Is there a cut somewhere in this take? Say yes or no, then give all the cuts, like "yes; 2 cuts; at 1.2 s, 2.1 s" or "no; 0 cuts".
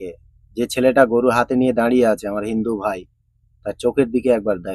no; 0 cuts